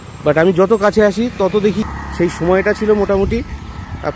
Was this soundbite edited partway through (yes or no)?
yes